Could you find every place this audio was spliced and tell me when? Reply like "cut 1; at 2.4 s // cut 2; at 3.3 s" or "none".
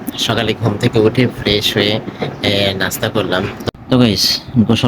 cut 1; at 3.6 s